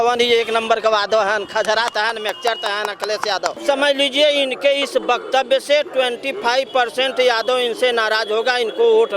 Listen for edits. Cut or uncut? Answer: cut